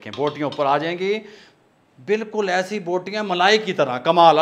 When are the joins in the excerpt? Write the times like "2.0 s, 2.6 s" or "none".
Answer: none